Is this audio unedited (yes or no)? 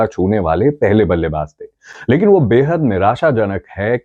yes